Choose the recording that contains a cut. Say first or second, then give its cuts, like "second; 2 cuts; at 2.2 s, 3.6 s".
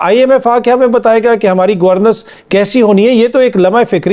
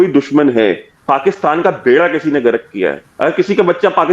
second; 2 cuts; at 0.9 s, 3.1 s